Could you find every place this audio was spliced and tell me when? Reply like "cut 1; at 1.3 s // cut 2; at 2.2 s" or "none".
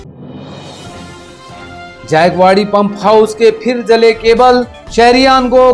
cut 1; at 1.0 s